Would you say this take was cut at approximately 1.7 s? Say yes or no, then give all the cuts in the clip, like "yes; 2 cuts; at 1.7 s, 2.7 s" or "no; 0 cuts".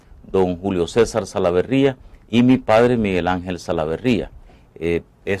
yes; 1 cut; at 1.7 s